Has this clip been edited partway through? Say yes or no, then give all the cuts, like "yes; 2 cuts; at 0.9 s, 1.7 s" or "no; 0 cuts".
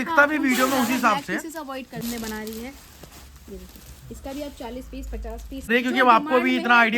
yes; 2 cuts; at 2.0 s, 5.7 s